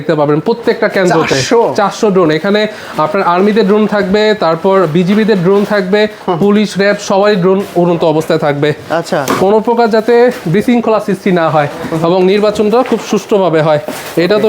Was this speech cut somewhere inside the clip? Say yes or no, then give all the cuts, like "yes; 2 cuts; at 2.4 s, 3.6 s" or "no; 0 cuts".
no; 0 cuts